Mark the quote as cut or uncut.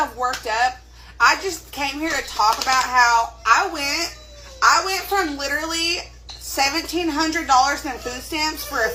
uncut